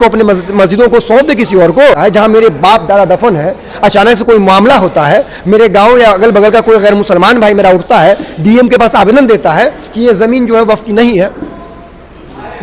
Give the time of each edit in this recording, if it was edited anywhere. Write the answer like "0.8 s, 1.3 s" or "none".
2.0 s